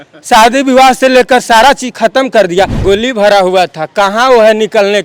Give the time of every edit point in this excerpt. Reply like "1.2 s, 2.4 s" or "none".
2.8 s

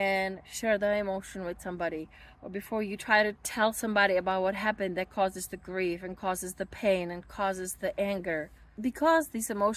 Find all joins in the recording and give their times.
8.6 s

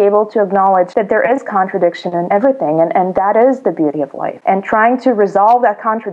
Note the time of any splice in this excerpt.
0.9 s, 2.3 s, 4.3 s

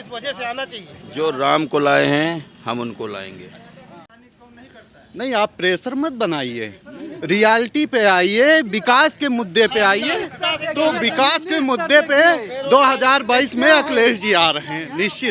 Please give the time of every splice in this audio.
3.9 s

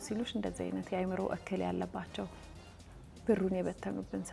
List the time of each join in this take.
none

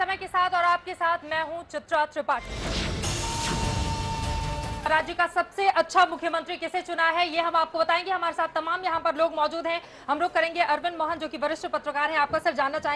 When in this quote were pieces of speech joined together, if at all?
4.9 s

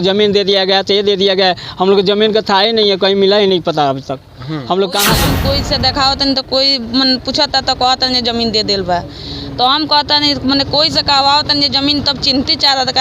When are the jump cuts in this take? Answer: 5.3 s

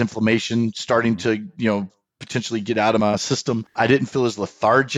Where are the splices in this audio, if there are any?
3.2 s

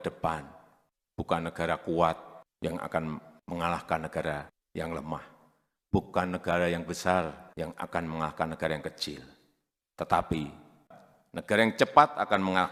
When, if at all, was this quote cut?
none

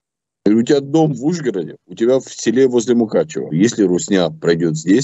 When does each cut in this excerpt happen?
3.5 s

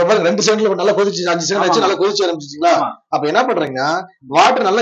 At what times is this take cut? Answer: none

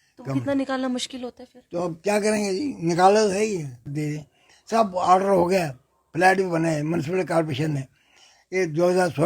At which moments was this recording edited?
3.9 s

